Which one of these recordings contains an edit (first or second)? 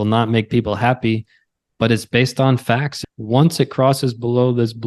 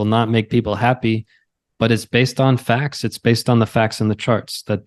first